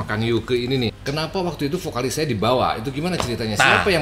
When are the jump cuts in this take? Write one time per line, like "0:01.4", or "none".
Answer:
0:01.0

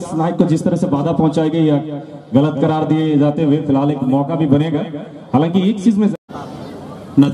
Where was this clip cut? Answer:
0:06.1

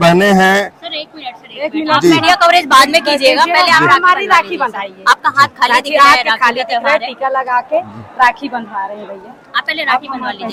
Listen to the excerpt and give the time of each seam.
none

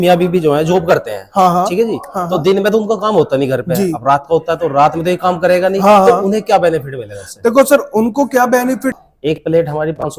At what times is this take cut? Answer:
0:08.9

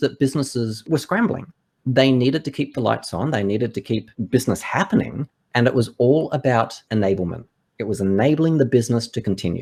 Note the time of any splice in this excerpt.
none

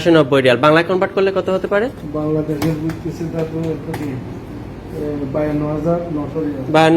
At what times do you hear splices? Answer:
none

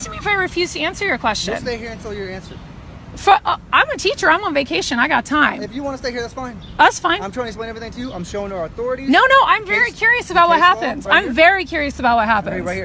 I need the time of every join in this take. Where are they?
none

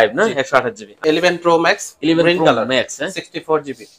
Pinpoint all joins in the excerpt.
0:01.0

